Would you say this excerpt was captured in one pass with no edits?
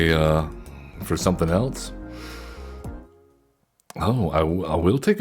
no; 1 cut; at 3.0 s

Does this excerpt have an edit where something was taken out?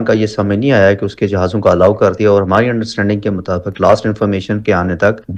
no; 0 cuts

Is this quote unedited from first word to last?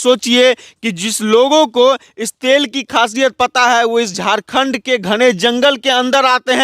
yes; 0 cuts

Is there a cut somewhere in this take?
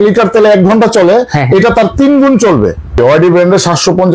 yes; 1 cut; at 3.0 s

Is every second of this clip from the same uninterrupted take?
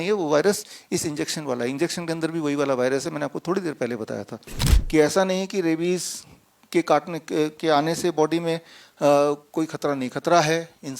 no; 1 cut; at 4.7 s

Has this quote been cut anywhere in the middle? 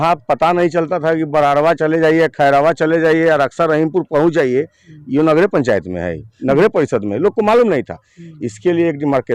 no; 0 cuts

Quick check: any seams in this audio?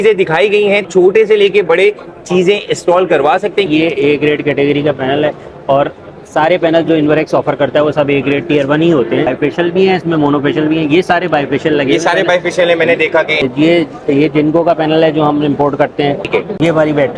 yes; 5 cuts; at 0.8 s, 3.7 s, 9.3 s, 13.4 s, 16.3 s

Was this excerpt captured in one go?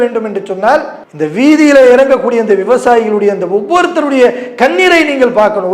no; 1 cut; at 1.0 s

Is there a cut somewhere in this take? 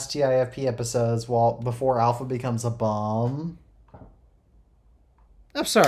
no; 0 cuts

